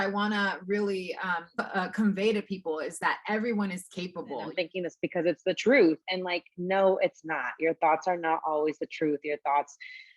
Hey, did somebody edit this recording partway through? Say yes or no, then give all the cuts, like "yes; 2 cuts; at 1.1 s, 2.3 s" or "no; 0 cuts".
yes; 2 cuts; at 1.5 s, 4.5 s